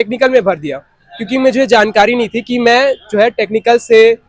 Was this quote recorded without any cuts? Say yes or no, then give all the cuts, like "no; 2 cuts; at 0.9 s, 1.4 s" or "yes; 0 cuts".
yes; 0 cuts